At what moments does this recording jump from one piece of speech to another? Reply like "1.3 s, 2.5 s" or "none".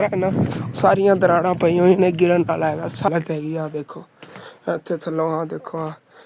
3.1 s